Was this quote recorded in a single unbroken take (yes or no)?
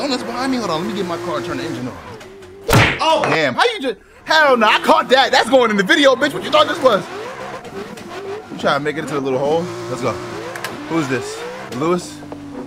yes